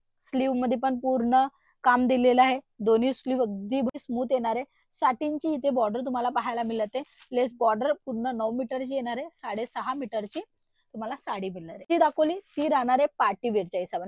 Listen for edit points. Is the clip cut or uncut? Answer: cut